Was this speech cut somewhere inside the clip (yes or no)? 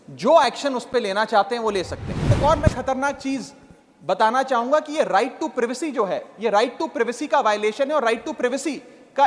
yes